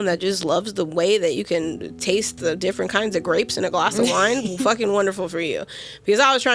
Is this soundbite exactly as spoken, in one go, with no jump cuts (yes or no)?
yes